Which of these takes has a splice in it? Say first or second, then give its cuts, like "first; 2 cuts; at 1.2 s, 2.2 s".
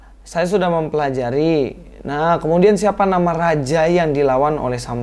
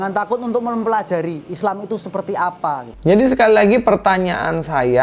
second; 1 cut; at 2.9 s